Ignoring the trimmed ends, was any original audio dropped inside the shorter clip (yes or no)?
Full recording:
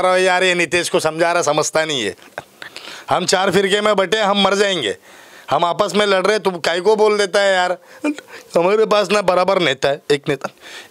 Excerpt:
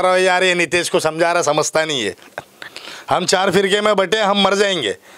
no